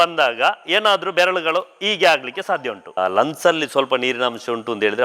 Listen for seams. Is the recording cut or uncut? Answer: cut